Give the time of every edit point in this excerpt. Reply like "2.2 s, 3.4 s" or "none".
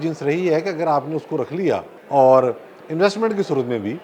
1.9 s